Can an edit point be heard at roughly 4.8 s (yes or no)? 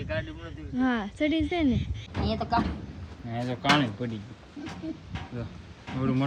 no